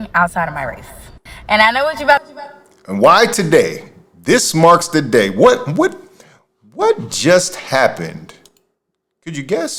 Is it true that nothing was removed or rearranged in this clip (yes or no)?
yes